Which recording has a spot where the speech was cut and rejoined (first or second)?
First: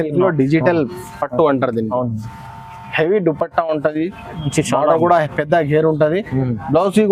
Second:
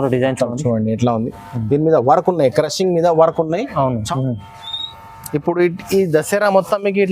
second